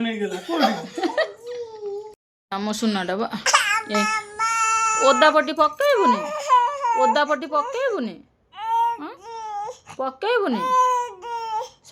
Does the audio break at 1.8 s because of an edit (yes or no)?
yes